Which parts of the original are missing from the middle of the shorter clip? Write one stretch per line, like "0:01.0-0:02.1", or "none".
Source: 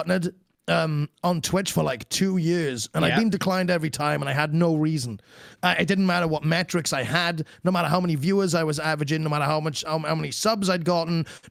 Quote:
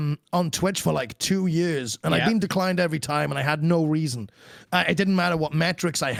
none